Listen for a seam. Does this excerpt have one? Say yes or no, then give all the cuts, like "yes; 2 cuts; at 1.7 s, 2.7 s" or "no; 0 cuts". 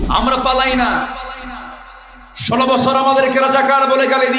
no; 0 cuts